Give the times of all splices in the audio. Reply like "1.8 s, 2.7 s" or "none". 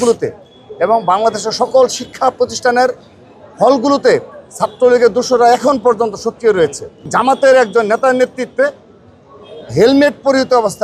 7.1 s

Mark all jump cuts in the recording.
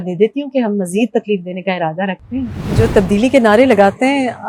2.6 s

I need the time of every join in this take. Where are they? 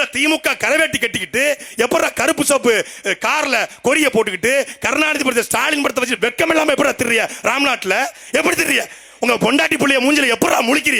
none

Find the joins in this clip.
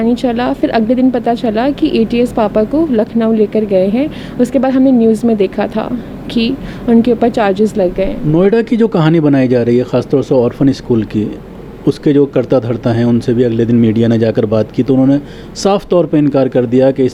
none

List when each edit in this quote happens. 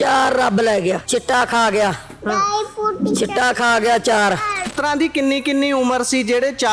1.0 s, 4.6 s

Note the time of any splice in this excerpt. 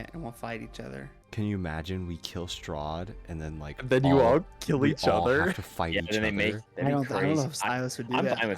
1.2 s, 6.6 s

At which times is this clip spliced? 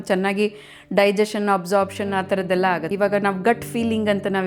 2.9 s

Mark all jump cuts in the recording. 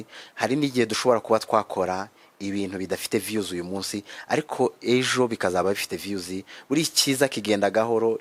none

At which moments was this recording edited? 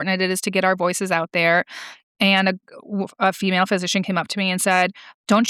none

